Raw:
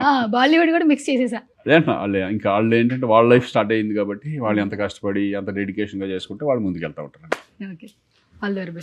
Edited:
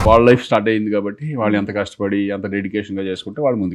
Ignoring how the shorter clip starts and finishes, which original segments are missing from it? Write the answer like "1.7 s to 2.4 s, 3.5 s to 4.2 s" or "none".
none